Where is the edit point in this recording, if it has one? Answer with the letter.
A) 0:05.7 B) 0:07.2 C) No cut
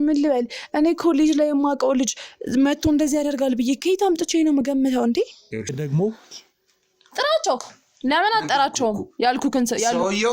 A